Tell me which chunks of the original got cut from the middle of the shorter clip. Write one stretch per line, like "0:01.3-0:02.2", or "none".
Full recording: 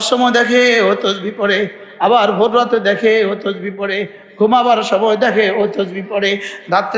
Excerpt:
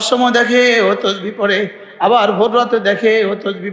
none